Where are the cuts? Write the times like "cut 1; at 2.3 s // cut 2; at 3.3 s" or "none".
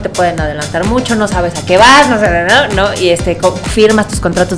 none